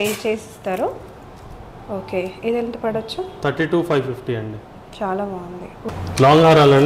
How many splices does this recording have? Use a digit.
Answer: 1